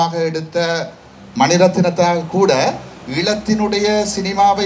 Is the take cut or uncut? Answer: uncut